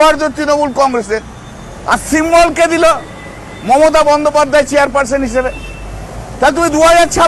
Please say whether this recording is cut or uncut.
uncut